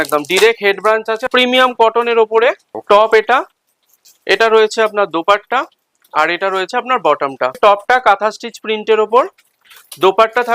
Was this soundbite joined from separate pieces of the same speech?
yes; 3 cuts; at 1.3 s, 2.7 s, 7.6 s

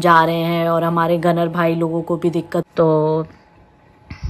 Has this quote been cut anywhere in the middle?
yes; 1 cut; at 2.7 s

